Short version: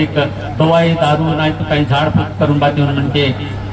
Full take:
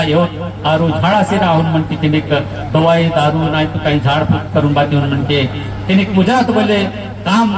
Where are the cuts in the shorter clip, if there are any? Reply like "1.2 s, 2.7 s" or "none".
none